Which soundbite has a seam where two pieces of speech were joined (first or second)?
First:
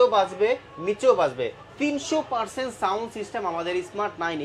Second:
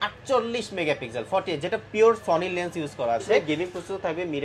second